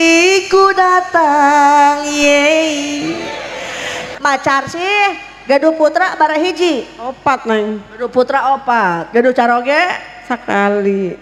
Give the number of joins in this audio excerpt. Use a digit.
1